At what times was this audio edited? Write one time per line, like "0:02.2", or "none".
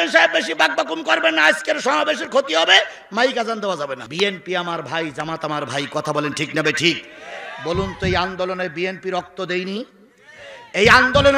0:04.0